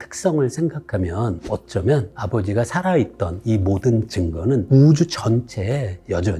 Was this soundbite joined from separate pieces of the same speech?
yes; 1 cut; at 1.4 s

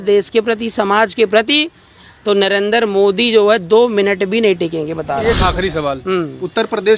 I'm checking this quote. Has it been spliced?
yes; 1 cut; at 5.2 s

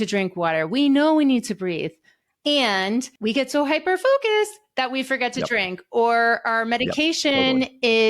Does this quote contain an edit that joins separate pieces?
yes; 1 cut; at 3.1 s

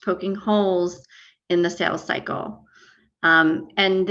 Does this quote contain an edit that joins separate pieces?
no; 0 cuts

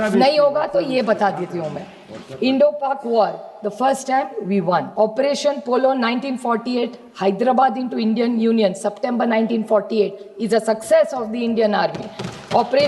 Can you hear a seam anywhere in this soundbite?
yes; 1 cut; at 4.9 s

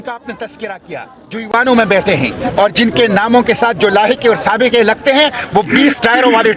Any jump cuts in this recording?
no; 0 cuts

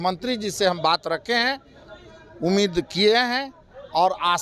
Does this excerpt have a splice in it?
no; 0 cuts

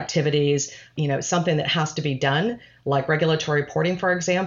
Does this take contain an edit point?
no; 0 cuts

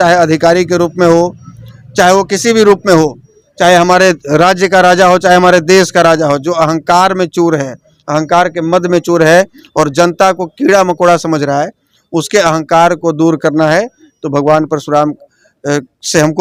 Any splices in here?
no; 0 cuts

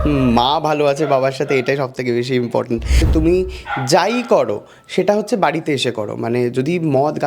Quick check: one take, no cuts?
no; 1 cut; at 3.0 s

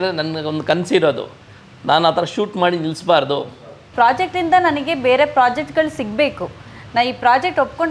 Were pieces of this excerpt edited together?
yes; 1 cut; at 3.9 s

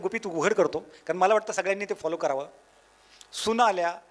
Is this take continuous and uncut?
yes; 0 cuts

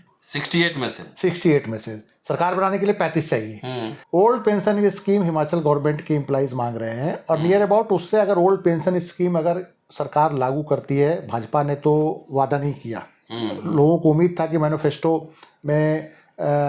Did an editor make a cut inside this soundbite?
yes; 1 cut; at 3.9 s

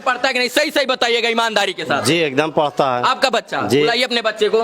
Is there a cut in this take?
no; 0 cuts

